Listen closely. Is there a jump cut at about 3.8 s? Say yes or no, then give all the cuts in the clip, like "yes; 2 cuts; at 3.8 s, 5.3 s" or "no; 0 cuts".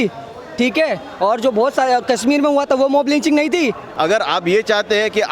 yes; 1 cut; at 3.8 s